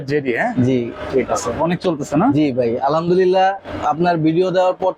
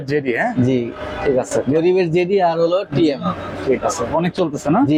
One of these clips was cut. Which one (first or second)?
first